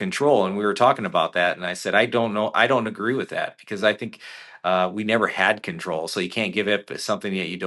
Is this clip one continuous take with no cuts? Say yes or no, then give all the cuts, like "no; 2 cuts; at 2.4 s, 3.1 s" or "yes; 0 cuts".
yes; 0 cuts